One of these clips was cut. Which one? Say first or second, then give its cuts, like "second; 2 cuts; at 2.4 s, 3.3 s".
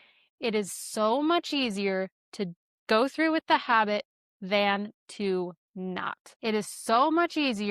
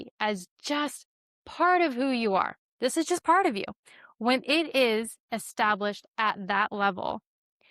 first; 1 cut; at 6.2 s